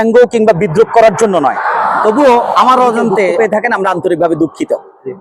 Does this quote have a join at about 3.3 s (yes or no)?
yes